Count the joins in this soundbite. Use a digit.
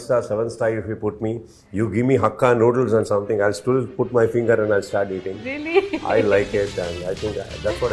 0